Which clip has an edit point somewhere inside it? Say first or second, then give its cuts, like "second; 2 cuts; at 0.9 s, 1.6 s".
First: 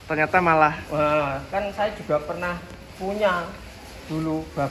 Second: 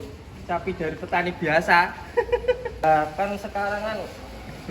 second; 1 cut; at 2.8 s